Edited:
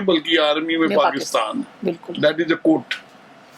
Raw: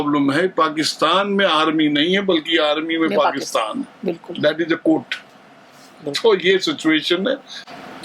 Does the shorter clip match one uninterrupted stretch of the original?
yes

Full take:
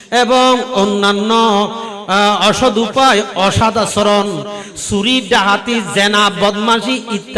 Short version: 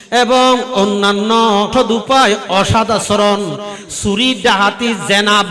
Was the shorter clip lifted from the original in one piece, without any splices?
no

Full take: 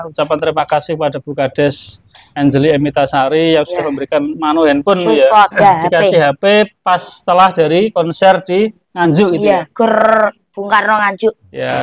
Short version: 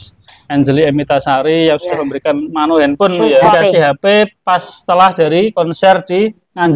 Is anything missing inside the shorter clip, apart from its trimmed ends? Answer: yes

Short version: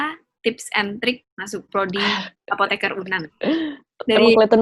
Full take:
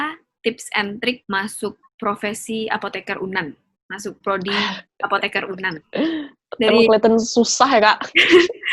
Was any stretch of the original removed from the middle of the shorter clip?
yes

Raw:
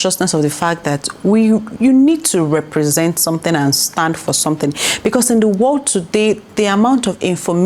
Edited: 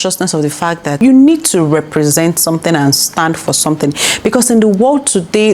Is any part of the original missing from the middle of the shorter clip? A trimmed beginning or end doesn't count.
yes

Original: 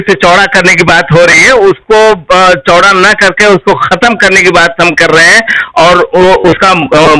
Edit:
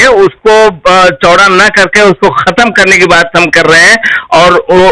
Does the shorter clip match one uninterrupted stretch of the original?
yes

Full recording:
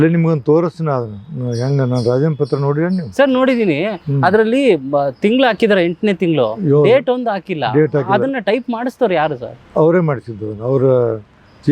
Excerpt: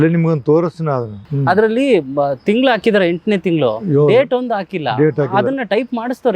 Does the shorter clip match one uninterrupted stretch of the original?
no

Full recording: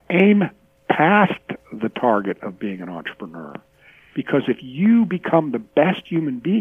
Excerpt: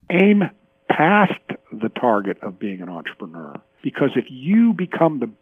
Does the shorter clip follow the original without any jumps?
no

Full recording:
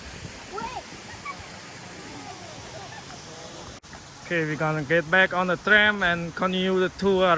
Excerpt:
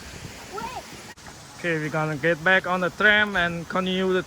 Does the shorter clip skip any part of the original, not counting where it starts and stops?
yes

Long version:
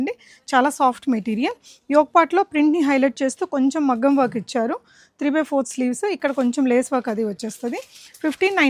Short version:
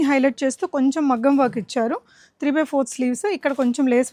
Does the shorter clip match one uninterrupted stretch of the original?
yes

